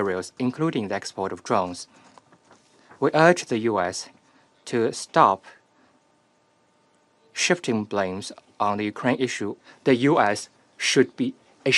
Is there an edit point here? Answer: yes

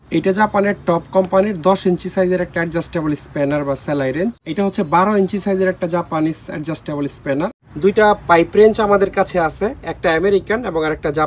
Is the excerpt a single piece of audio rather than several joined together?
no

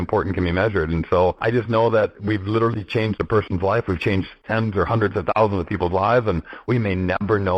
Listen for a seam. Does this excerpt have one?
yes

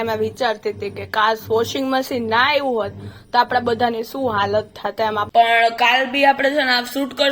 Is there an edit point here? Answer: yes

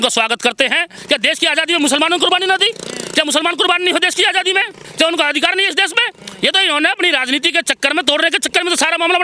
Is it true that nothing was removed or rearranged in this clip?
no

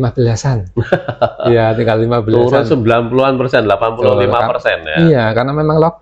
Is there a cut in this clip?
no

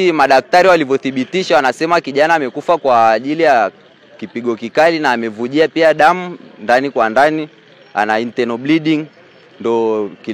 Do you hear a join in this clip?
no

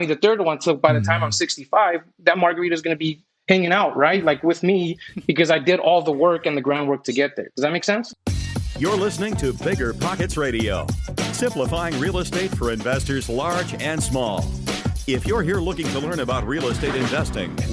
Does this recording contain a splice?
yes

